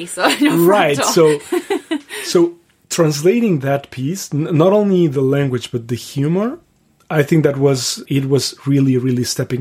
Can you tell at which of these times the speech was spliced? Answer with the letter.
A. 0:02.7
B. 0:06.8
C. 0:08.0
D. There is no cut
C